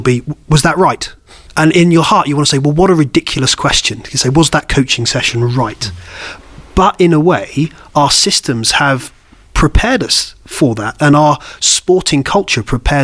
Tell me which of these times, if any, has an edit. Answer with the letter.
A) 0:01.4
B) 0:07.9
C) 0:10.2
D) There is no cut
A